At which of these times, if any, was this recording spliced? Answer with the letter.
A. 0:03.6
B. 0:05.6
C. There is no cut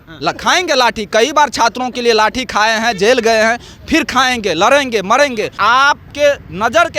B